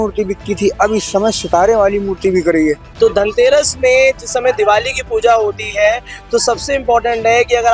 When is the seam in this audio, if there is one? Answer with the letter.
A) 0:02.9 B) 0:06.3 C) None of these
A